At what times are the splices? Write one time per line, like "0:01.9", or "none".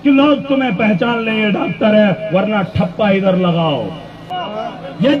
0:04.3